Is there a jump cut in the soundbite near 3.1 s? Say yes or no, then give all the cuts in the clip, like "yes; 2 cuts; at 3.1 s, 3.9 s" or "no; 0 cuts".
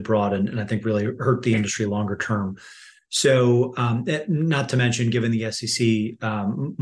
no; 0 cuts